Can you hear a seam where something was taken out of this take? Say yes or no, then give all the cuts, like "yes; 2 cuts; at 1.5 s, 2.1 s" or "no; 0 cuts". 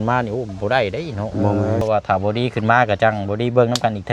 yes; 1 cut; at 1.8 s